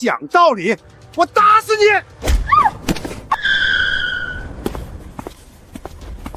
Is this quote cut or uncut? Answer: cut